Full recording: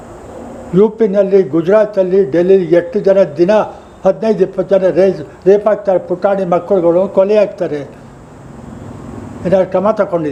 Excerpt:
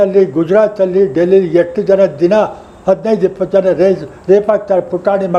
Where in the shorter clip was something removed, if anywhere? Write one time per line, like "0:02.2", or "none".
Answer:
none